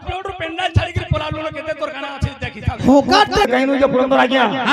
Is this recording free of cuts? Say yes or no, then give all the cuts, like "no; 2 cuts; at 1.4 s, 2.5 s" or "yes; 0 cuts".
no; 1 cut; at 3.5 s